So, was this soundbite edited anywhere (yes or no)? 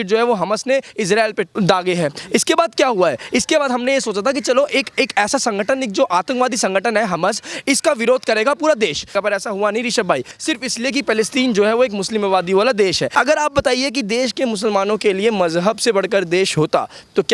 yes